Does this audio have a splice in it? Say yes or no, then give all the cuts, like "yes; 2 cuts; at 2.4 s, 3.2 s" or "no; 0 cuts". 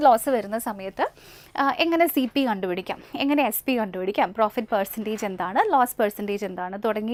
no; 0 cuts